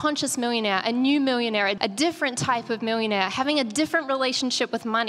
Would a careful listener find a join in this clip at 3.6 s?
no; 1 cut; at 1.8 s

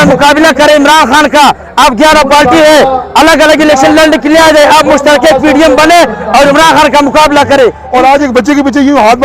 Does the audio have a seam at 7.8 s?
yes; 1 cut; at 7.8 s

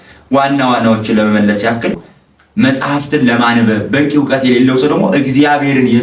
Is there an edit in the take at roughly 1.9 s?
yes; 1 cut; at 1.9 s

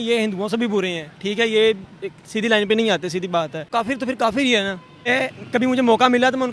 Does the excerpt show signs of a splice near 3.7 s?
yes; 2 cuts; at 3.7 s, 5.1 s

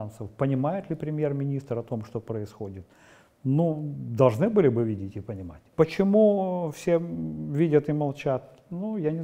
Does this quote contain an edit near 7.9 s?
no; 1 cut; at 5.6 s

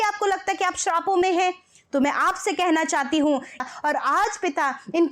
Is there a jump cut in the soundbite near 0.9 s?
no; 1 cut; at 3.6 s

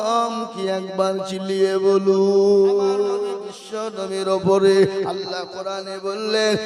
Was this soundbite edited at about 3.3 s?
yes; 1 cut; at 3.3 s

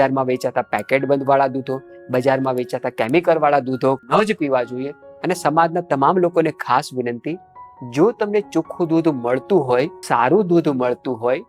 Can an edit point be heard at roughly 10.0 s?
yes; 3 cuts; at 4.0 s, 5.0 s, 10.0 s

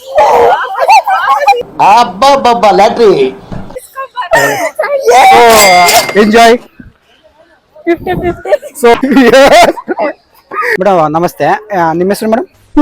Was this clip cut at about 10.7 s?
yes; 2 cuts; at 9.0 s, 10.7 s

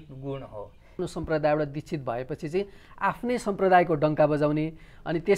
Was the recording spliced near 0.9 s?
yes; 1 cut; at 0.9 s

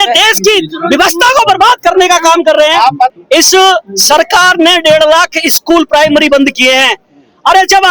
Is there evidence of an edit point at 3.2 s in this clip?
yes; 1 cut; at 3.2 s

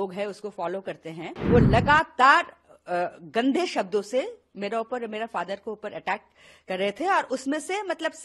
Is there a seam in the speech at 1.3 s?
yes; 1 cut; at 1.3 s

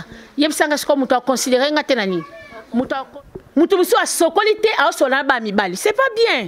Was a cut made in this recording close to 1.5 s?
no; 1 cut; at 3.1 s

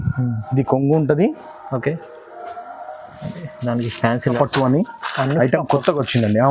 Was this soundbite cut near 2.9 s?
no; 1 cut; at 4.4 s

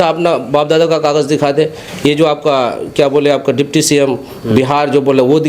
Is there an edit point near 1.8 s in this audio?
no; 0 cuts

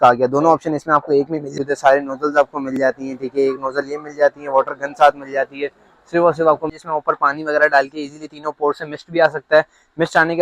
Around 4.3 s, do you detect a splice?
no; 2 cuts; at 1.5 s, 6.7 s

